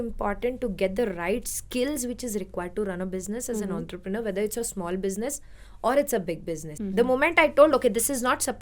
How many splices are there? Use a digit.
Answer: 1